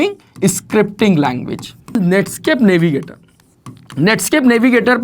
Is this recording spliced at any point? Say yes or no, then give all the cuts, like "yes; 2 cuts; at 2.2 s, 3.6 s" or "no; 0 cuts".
yes; 1 cut; at 1.9 s